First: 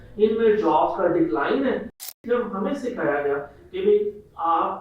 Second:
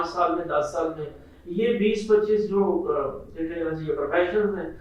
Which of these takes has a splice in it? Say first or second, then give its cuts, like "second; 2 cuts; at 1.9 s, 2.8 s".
first; 1 cut; at 2.1 s